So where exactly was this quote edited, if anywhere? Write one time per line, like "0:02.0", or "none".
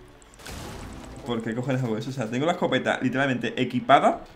0:01.1